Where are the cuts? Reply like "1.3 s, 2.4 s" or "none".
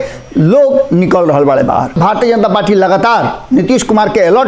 2.0 s